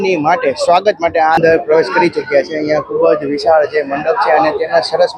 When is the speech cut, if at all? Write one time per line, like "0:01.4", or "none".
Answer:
0:01.4